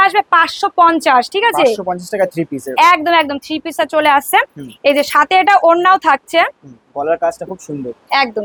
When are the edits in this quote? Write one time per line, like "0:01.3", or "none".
none